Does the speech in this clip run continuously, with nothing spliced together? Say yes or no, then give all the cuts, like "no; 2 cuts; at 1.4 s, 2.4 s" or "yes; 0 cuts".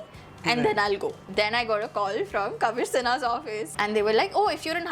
no; 2 cuts; at 1.2 s, 3.7 s